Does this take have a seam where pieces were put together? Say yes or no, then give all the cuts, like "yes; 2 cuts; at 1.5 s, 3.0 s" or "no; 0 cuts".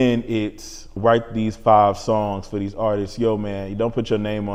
no; 0 cuts